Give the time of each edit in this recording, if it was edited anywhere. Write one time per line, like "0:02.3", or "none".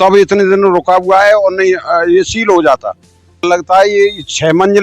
0:03.4